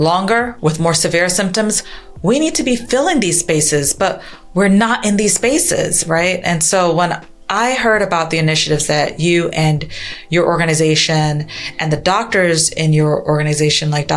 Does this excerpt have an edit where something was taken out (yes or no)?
no